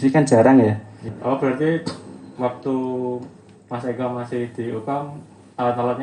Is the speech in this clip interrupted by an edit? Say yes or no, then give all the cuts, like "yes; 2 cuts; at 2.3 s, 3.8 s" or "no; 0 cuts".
yes; 1 cut; at 1.1 s